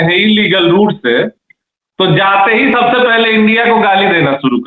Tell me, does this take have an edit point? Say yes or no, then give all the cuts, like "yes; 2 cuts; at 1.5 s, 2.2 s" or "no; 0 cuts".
no; 0 cuts